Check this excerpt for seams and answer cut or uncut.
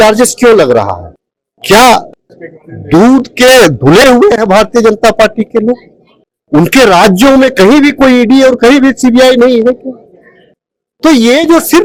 uncut